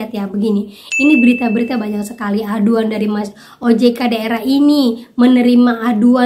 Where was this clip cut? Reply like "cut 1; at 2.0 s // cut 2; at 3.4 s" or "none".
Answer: none